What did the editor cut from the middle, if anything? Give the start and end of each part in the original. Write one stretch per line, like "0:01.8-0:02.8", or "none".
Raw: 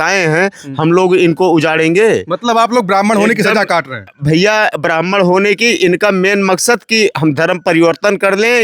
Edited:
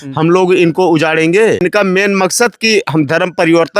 0:02.2-0:05.9